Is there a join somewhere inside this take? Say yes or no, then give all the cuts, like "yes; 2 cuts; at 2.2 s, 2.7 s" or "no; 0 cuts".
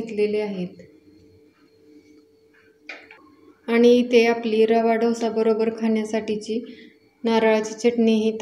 yes; 1 cut; at 3.3 s